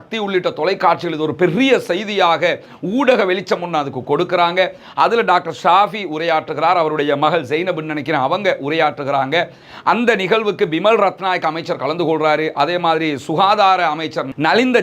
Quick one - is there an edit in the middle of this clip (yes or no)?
no